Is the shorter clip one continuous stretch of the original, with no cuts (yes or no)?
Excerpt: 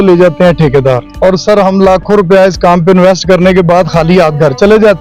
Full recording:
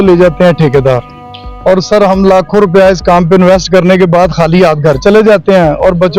no